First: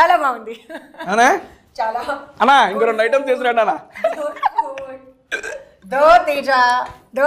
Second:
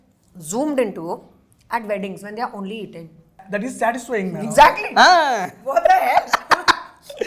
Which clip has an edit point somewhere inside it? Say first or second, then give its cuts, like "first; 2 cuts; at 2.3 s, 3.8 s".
second; 1 cut; at 3.4 s